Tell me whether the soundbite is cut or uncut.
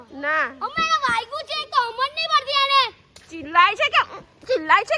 uncut